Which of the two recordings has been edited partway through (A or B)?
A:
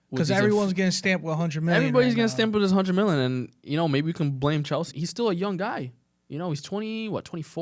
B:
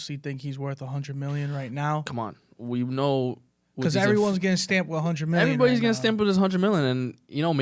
A